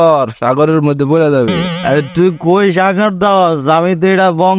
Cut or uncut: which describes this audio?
uncut